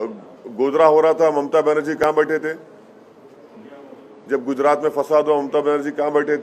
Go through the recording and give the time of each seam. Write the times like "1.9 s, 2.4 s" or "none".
none